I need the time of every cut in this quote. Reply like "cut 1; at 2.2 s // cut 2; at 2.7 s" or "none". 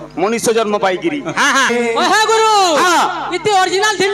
cut 1; at 1.7 s